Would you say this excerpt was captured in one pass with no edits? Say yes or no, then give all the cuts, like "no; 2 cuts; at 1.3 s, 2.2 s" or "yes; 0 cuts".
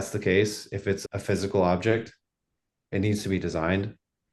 yes; 0 cuts